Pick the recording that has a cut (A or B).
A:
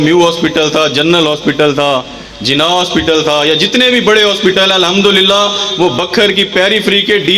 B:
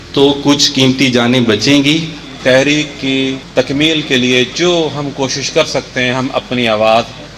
B